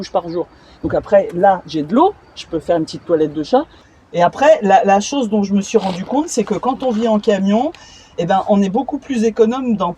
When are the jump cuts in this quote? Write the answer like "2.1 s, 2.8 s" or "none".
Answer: 3.8 s